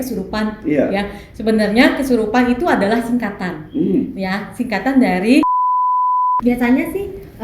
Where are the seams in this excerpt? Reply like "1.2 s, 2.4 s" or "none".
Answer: 6.0 s